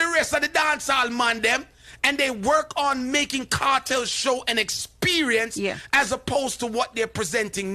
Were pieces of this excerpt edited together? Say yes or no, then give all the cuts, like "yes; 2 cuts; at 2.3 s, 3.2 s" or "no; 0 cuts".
no; 0 cuts